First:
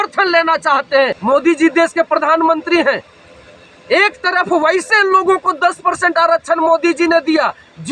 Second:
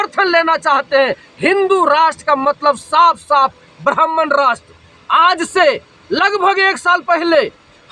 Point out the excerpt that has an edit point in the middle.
first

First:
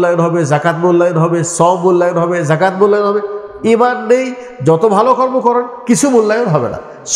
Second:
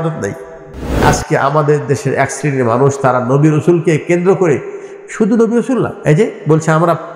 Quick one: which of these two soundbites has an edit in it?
second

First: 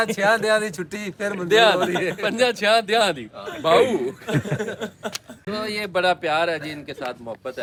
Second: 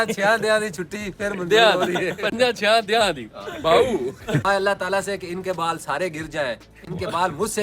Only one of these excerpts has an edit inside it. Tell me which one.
second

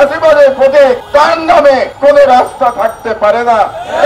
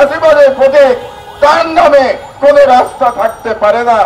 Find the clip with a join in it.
first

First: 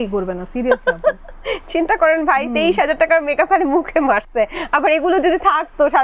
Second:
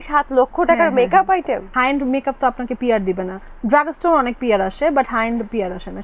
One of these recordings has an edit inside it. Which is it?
second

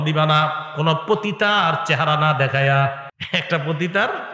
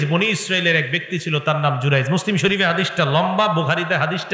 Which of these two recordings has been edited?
first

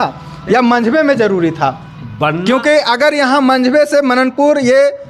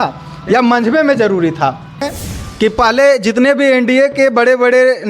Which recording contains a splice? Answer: second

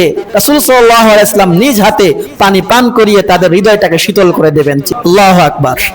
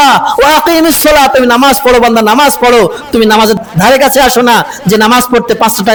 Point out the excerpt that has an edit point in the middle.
first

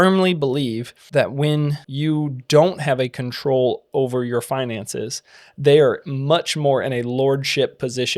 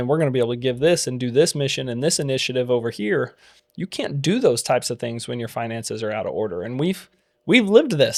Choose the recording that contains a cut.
first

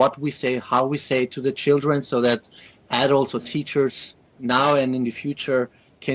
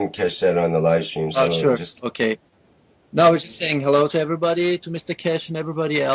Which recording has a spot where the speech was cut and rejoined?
first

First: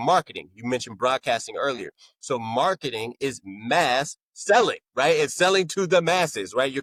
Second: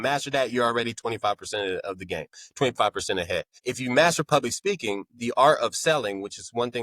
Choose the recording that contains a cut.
second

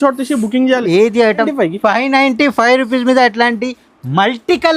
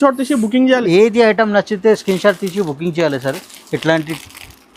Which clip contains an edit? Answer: first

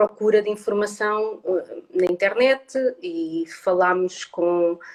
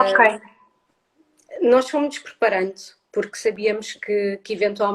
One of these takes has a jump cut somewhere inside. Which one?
second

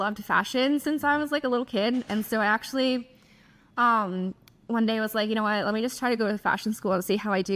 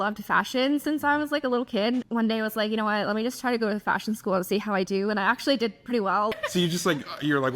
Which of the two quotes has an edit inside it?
second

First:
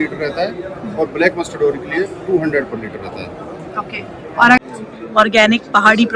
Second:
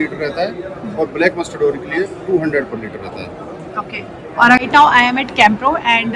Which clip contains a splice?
first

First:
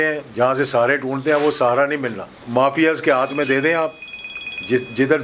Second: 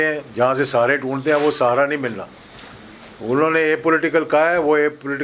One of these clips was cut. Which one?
first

